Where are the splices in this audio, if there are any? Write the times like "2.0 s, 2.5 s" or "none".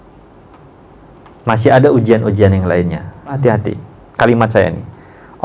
3.4 s